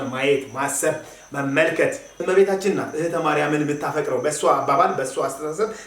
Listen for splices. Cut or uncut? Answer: cut